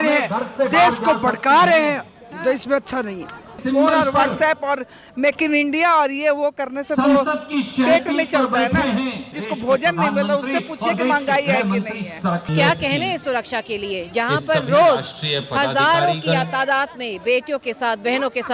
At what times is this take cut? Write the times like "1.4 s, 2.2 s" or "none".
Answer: 3.6 s, 9.3 s, 12.5 s